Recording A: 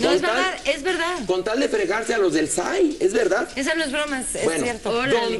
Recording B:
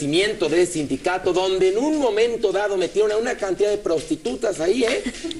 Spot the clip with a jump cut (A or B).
B